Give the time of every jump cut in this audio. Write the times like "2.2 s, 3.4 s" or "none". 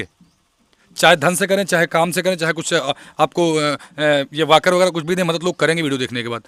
none